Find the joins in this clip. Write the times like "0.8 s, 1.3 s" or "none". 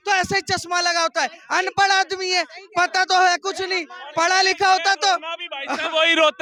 none